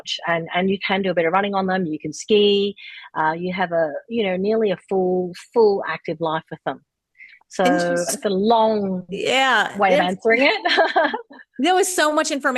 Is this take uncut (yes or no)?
yes